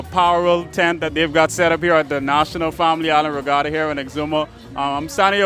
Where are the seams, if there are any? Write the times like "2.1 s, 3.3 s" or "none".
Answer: none